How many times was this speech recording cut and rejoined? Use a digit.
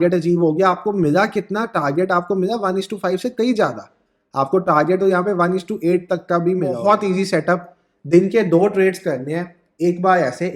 1